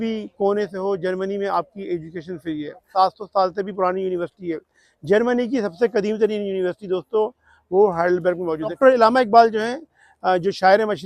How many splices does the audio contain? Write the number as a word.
two